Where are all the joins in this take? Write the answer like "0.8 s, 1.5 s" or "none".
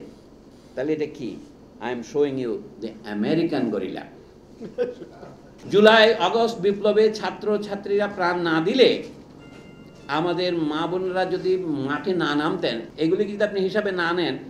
5.5 s, 12.8 s